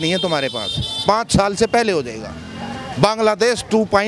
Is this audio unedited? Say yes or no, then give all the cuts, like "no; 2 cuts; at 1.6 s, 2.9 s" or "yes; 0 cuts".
yes; 0 cuts